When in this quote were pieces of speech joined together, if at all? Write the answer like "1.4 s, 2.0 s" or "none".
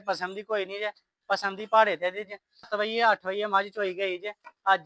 2.7 s